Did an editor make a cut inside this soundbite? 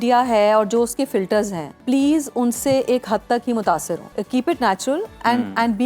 yes; 2 cuts; at 1.7 s, 4.1 s

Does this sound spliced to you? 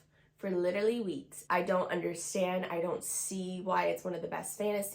yes; 1 cut; at 1.3 s

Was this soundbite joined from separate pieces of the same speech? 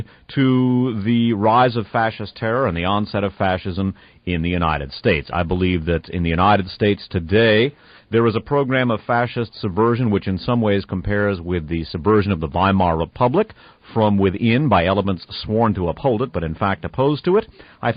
no; 0 cuts

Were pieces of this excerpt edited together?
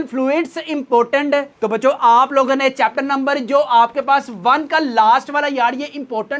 yes; 1 cut; at 1.5 s

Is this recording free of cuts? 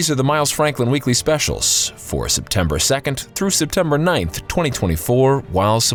yes; 0 cuts

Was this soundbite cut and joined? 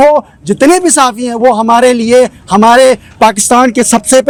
no; 0 cuts

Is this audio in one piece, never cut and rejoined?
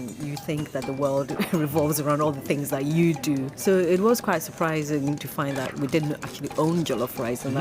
no; 2 cuts; at 3.5 s, 5.2 s

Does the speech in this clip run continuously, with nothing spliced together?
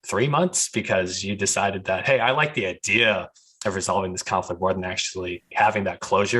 no; 1 cut; at 5.4 s

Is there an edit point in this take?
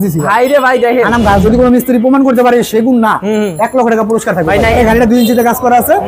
yes; 2 cuts; at 1.4 s, 4.8 s

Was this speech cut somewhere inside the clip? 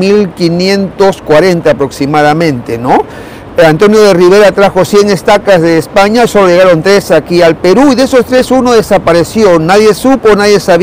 no; 0 cuts

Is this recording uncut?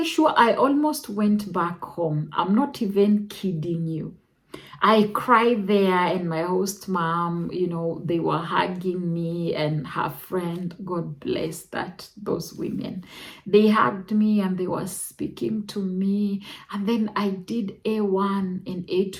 yes; 0 cuts

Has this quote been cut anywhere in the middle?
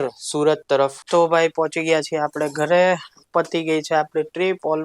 yes; 1 cut; at 1.0 s

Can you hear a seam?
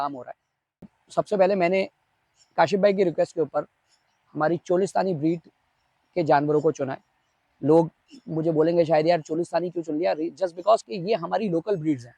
yes; 1 cut; at 0.9 s

